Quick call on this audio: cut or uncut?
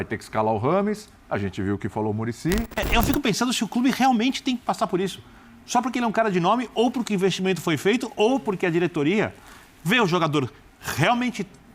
cut